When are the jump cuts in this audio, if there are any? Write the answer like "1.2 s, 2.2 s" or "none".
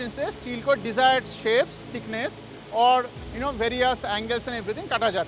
none